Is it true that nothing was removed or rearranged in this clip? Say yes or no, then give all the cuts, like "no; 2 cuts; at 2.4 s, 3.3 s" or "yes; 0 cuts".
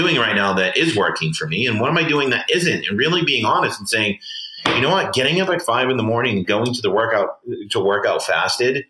yes; 0 cuts